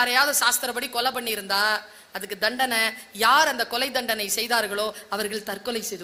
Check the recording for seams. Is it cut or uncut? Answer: uncut